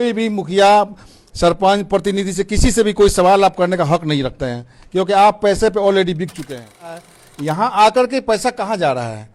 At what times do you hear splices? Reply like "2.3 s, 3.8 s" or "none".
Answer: 7.1 s